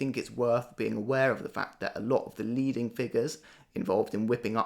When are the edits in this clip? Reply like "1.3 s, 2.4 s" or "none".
3.4 s

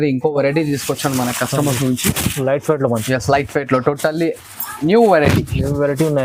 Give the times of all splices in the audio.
none

